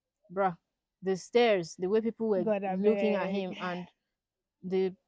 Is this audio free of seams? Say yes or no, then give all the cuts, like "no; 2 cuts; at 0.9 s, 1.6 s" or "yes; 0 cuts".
yes; 0 cuts